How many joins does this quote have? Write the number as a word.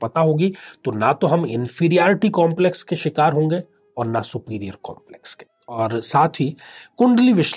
one